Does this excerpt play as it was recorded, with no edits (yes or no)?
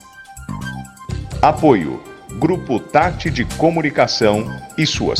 no